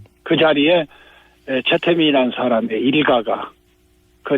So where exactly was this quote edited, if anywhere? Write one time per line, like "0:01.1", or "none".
0:02.0